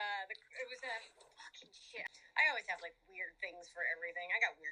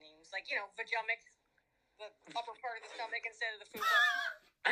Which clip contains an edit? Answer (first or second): first